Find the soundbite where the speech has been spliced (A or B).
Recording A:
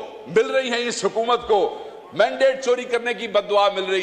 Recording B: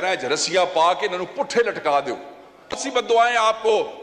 B